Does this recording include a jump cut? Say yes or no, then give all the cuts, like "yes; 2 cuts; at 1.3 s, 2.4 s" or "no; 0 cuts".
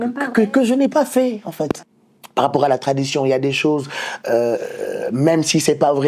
yes; 1 cut; at 2.2 s